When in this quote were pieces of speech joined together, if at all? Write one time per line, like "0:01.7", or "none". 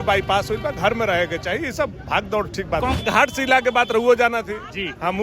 0:02.9